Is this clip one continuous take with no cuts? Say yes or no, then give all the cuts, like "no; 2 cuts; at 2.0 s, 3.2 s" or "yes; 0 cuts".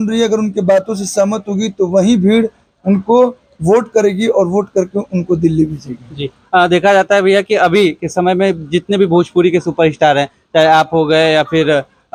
yes; 0 cuts